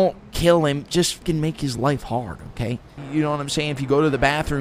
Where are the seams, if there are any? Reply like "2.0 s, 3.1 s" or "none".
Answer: 1.2 s, 3.0 s